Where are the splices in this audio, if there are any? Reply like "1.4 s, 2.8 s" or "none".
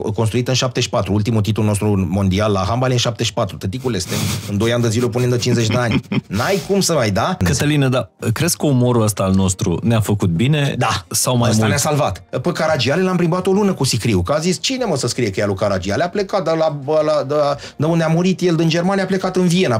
7.4 s, 12.3 s